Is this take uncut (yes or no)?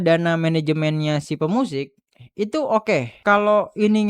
no